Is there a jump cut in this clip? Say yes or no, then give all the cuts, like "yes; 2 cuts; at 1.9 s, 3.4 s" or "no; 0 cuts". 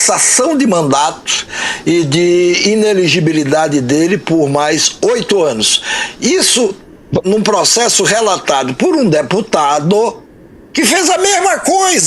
no; 0 cuts